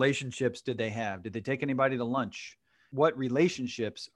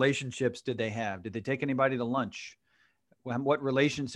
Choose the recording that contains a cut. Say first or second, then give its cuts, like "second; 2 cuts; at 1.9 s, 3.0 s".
first; 1 cut; at 2.9 s